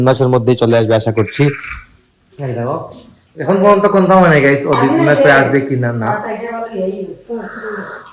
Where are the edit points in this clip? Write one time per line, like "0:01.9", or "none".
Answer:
none